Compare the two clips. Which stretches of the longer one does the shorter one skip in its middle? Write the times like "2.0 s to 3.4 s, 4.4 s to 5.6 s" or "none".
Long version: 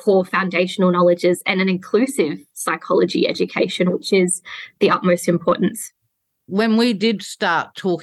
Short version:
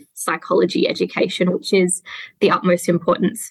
none